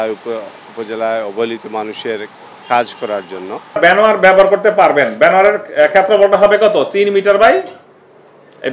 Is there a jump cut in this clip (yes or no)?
yes